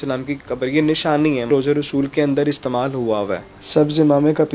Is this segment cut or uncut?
cut